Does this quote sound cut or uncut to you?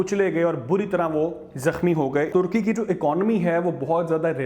cut